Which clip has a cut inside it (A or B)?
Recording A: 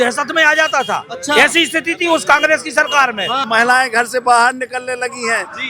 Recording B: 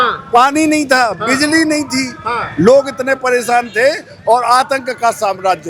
A